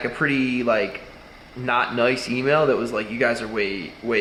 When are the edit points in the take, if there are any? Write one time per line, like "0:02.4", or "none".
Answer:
none